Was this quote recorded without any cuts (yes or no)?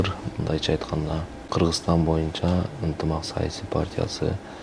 no